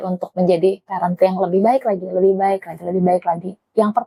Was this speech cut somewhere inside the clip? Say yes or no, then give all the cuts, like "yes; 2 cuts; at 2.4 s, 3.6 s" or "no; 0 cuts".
no; 0 cuts